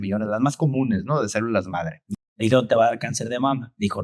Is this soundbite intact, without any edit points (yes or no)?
no